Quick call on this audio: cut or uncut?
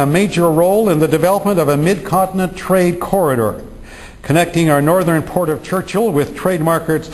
cut